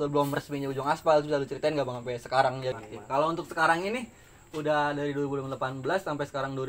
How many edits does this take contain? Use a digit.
1